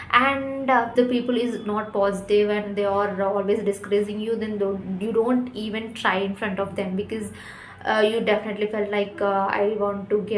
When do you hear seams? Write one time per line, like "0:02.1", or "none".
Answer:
0:00.9